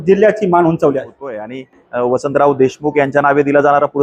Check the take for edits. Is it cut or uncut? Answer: cut